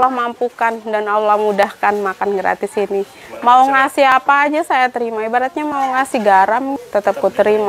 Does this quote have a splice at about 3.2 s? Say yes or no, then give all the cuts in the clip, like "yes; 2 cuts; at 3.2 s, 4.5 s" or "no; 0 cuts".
yes; 2 cuts; at 3.2 s, 6.8 s